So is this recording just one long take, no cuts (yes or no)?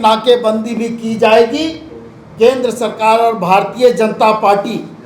yes